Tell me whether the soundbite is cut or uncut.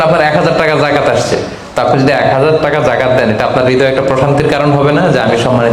uncut